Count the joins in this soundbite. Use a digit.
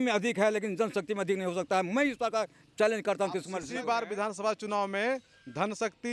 1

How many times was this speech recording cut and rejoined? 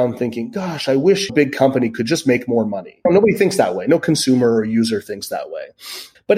2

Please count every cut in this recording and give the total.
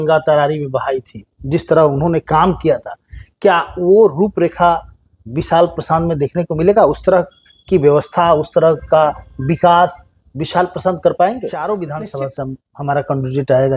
1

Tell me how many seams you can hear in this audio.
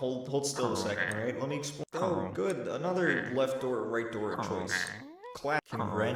0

